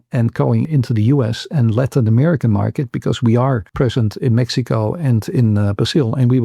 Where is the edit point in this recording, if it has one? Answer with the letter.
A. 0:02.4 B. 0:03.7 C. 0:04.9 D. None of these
B